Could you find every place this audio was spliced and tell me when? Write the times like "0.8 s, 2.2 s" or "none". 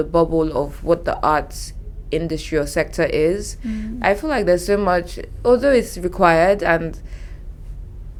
none